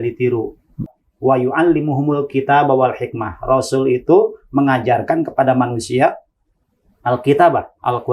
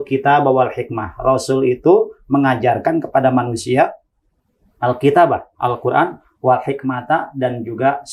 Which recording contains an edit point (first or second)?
first